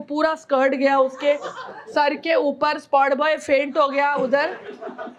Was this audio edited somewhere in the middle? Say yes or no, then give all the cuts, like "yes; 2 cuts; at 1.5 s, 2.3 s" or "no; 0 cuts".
no; 0 cuts